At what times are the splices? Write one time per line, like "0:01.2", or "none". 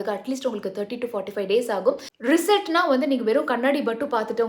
0:02.1

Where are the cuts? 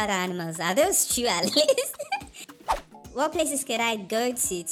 0:02.5

